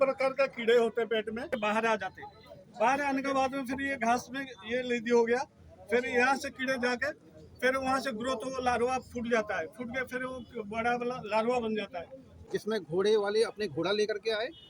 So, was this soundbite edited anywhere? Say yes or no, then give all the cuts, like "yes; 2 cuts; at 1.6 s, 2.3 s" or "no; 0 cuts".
yes; 2 cuts; at 1.5 s, 12.2 s